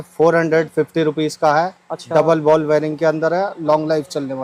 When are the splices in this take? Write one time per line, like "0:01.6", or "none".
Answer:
none